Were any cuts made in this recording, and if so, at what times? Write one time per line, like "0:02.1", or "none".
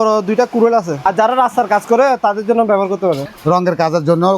0:01.0
0:03.3